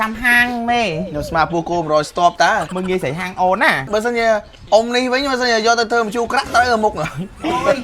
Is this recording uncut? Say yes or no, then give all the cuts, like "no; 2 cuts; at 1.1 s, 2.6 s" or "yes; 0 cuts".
no; 2 cuts; at 2.7 s, 3.9 s